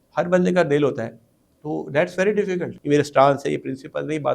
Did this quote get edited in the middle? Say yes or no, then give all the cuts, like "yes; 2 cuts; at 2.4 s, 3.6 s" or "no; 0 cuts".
yes; 1 cut; at 2.7 s